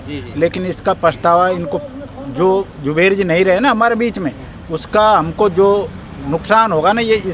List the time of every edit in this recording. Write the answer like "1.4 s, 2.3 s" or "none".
none